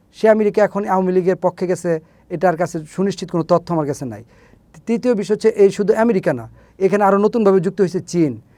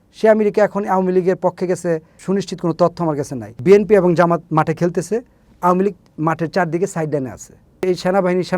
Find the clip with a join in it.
second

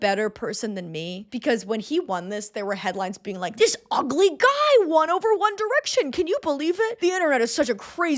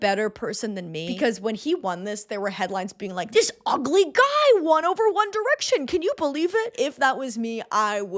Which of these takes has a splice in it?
second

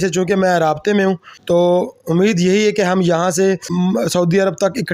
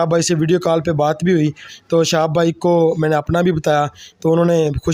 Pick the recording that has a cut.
first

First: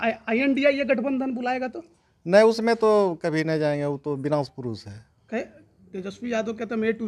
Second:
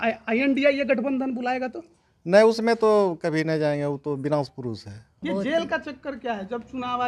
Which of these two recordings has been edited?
second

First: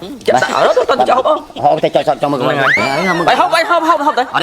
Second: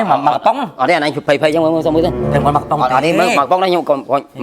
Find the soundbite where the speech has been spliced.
first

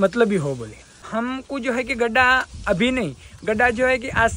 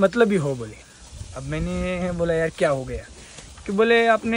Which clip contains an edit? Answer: first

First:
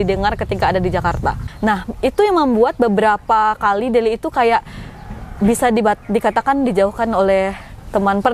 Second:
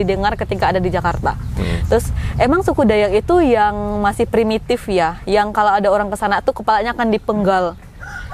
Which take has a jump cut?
first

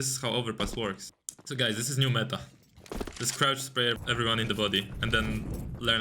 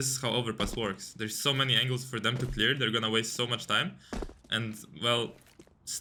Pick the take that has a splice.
first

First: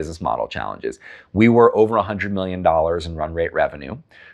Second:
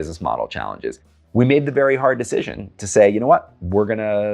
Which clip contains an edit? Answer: second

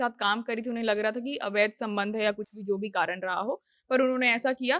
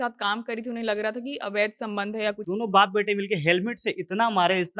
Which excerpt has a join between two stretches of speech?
second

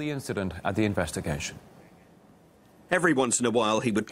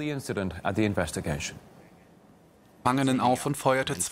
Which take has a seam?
first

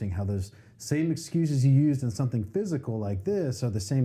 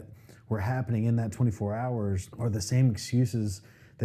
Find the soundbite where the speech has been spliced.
second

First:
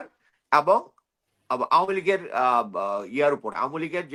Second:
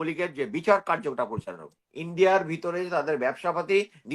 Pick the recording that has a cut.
second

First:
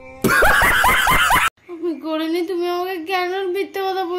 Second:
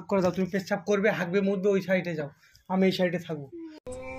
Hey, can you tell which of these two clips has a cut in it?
first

